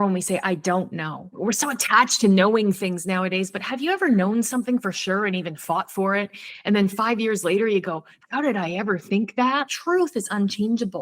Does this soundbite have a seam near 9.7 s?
yes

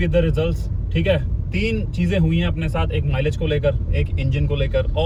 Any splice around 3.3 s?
no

